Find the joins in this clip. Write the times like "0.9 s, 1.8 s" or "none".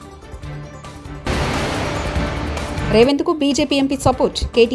1.2 s, 2.8 s